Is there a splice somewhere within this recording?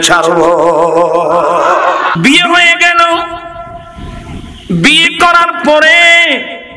yes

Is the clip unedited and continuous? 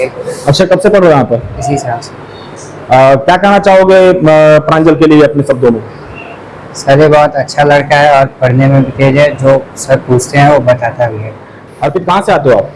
no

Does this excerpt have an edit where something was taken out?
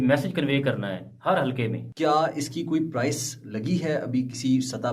yes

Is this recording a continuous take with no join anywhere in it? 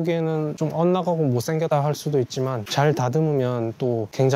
yes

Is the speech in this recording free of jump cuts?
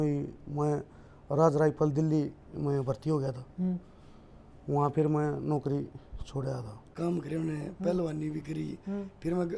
no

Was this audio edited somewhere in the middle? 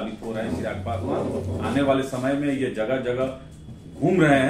no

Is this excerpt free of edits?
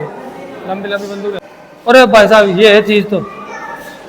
no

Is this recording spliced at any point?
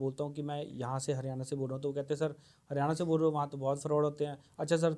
no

